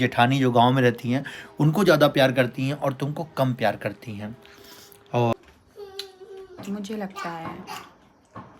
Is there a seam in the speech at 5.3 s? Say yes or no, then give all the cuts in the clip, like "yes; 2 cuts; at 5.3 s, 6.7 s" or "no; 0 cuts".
yes; 1 cut; at 5.3 s